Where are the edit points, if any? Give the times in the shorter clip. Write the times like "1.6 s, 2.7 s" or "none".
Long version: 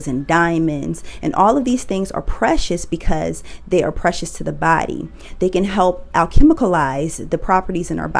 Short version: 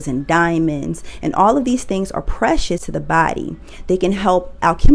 2.8 s